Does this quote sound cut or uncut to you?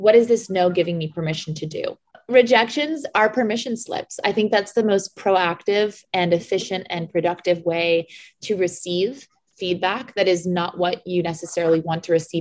cut